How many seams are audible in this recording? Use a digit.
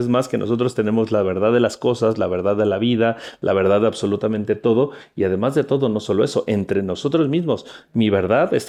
0